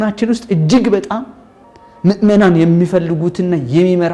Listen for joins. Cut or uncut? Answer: uncut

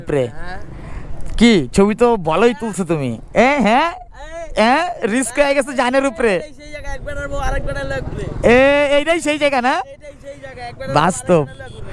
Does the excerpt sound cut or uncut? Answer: uncut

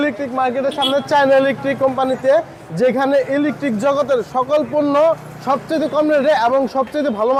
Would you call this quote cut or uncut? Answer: uncut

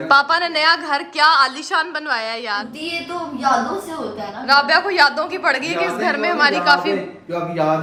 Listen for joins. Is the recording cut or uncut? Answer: uncut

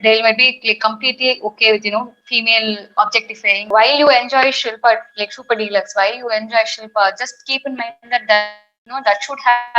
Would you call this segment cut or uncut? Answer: cut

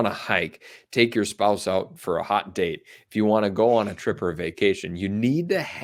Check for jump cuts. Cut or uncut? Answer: uncut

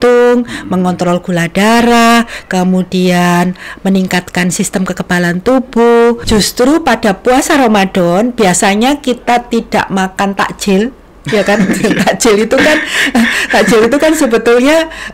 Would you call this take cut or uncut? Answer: cut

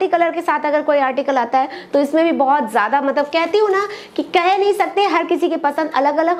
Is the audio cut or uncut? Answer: uncut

